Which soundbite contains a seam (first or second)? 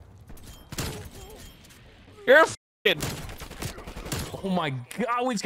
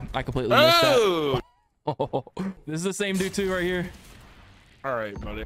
second